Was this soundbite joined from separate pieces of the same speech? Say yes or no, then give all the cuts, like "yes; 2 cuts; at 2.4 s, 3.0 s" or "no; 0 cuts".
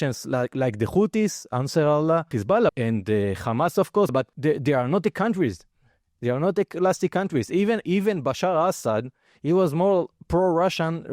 yes; 2 cuts; at 2.7 s, 4.1 s